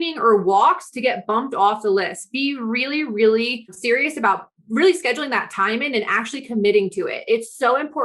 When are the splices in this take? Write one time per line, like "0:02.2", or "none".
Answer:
0:03.8